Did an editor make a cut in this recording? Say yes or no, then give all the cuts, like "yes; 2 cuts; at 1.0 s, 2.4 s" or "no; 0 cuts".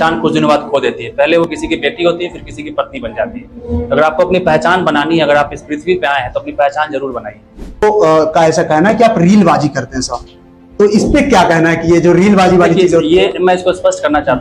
yes; 1 cut; at 7.8 s